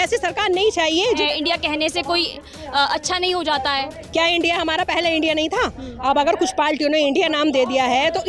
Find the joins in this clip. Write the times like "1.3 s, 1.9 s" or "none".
1.2 s